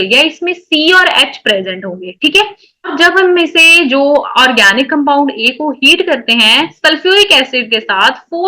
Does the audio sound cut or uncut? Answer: cut